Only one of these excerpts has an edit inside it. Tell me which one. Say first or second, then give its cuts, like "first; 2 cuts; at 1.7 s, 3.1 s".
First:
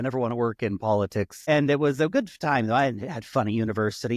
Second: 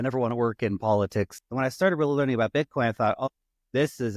second; 1 cut; at 1.4 s